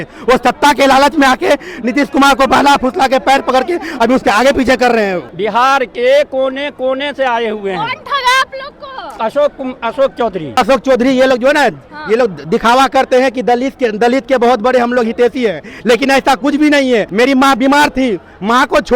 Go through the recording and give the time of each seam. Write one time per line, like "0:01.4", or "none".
0:05.3
0:10.6
0:17.1